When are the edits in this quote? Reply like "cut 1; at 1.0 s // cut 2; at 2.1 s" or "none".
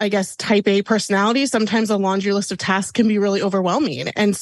none